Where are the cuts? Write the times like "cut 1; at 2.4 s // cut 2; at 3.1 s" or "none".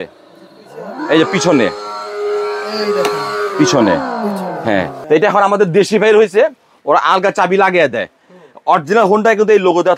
cut 1; at 4.9 s